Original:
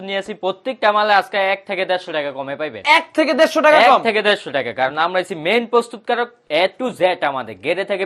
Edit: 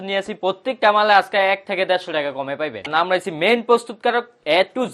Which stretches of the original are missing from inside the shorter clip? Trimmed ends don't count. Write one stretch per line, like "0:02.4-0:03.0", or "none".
0:02.8-0:04.9